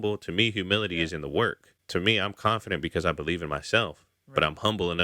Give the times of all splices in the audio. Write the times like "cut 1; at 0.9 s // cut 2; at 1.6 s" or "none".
cut 1; at 1.7 s